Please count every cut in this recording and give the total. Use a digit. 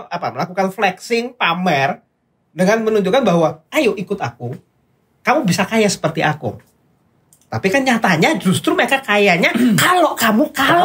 0